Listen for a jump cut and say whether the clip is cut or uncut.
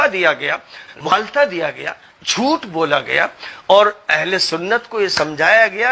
cut